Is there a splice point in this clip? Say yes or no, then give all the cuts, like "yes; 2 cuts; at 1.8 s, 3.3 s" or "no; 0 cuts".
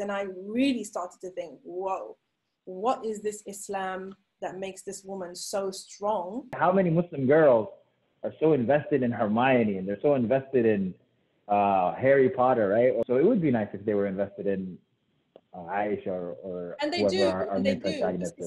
yes; 2 cuts; at 6.6 s, 13.0 s